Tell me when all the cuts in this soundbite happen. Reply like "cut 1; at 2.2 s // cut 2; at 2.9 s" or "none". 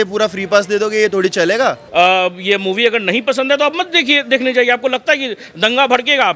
cut 1; at 1.8 s